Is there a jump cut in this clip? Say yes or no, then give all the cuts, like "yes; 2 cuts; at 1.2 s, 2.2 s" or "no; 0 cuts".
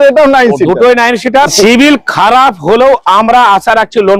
yes; 1 cut; at 1.5 s